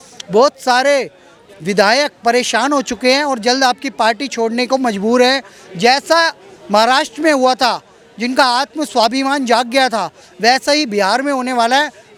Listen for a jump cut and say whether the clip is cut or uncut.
uncut